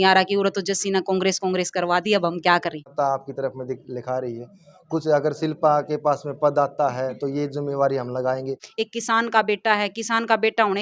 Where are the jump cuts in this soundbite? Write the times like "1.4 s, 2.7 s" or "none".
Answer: 2.8 s, 8.6 s